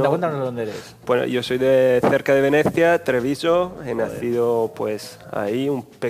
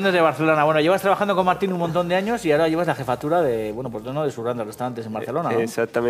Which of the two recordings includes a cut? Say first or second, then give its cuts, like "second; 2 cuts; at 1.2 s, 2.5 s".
second; 1 cut; at 1.4 s